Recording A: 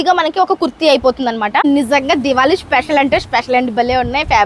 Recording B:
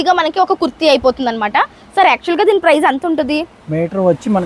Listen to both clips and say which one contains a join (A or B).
A